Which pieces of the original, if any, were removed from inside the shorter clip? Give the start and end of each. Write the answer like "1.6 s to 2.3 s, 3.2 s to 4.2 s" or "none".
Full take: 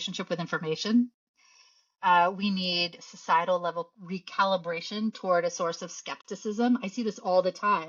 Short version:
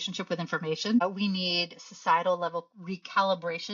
1.0 s to 2.2 s